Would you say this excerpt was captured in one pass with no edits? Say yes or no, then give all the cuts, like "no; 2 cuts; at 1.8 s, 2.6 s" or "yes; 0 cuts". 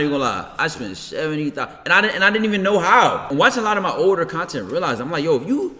no; 1 cut; at 3.3 s